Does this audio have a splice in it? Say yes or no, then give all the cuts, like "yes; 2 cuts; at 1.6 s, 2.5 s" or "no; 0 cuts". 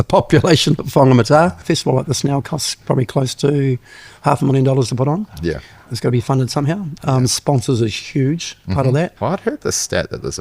yes; 2 cuts; at 1.6 s, 9.1 s